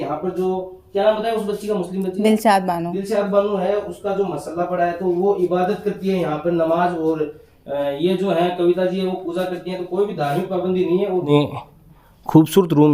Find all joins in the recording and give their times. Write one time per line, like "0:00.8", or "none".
0:11.3